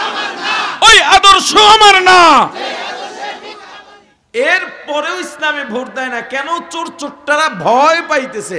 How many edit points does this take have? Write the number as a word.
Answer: one